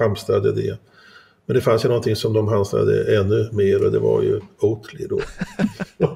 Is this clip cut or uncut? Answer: uncut